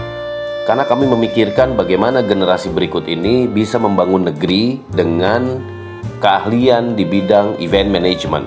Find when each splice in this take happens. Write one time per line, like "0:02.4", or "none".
none

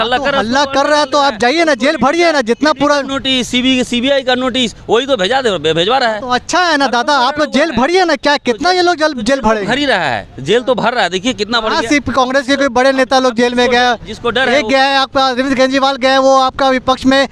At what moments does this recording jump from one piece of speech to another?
none

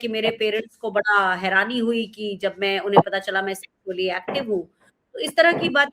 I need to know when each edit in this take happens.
none

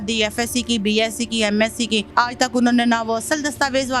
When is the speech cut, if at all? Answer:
0:02.1

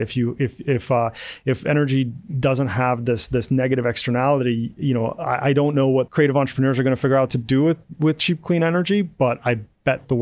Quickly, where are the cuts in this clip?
0:06.1

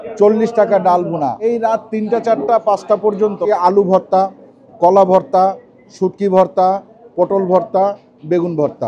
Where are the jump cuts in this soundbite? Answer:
0:01.4
0:03.5

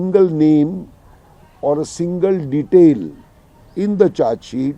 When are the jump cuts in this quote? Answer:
none

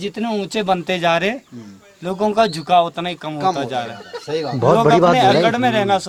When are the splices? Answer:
none

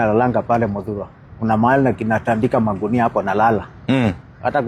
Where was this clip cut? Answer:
none

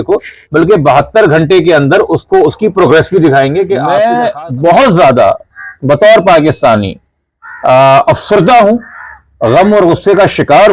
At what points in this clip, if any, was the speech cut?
0:03.8

